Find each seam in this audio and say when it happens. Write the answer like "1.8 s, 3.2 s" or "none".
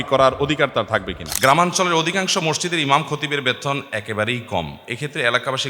1.2 s

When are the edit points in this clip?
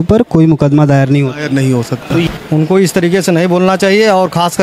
2.3 s

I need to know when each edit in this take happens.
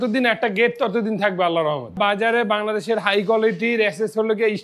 1.9 s

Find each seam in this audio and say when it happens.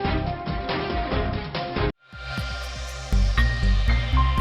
none

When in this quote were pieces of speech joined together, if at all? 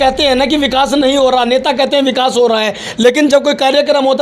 none

